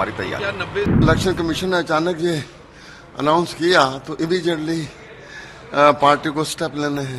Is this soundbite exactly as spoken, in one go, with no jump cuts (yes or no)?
no